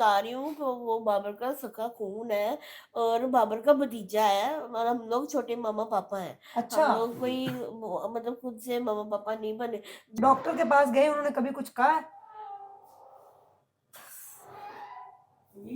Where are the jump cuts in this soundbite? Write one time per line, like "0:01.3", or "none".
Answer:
0:10.0